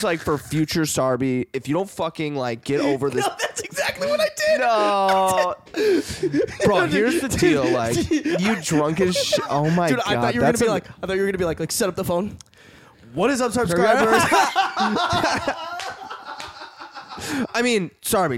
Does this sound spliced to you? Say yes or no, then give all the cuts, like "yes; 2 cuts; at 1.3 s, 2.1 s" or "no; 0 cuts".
no; 0 cuts